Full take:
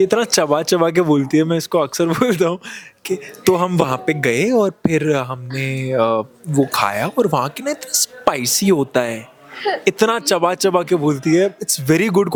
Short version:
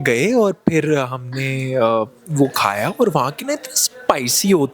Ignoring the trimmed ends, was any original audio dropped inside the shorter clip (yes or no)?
no